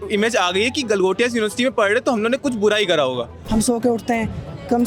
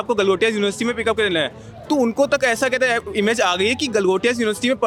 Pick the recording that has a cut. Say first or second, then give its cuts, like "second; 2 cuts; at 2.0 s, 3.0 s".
first; 1 cut; at 3.4 s